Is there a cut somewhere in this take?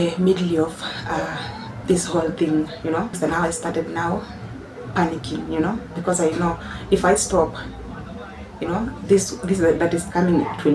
yes; 1 cut; at 3.1 s

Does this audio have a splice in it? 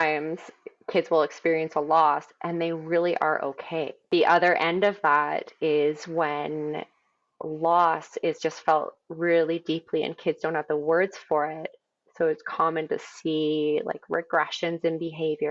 yes; 1 cut; at 4.1 s

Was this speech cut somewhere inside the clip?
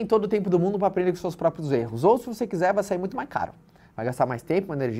no; 0 cuts

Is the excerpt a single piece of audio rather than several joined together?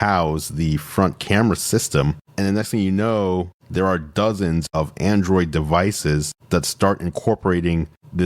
no; 2 cuts; at 2.3 s, 4.7 s

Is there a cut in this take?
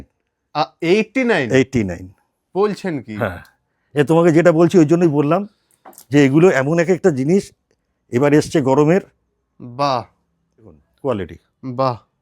yes; 1 cut; at 10.9 s

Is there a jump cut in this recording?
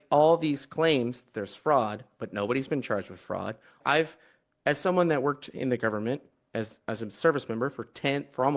yes; 1 cut; at 3.8 s

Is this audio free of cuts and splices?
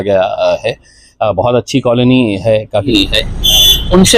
no; 1 cut; at 2.9 s

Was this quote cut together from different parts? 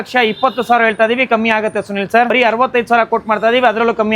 yes; 1 cut; at 2.3 s

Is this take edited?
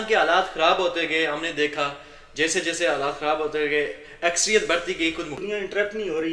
yes; 1 cut; at 5.4 s

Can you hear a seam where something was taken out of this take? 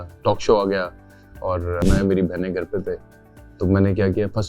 yes; 1 cut; at 1.8 s

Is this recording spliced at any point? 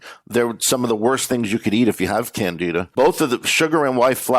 yes; 1 cut; at 2.9 s

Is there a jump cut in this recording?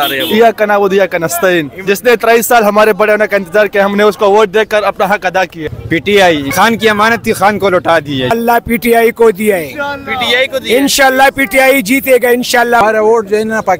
yes; 3 cuts; at 5.6 s, 8.3 s, 12.8 s

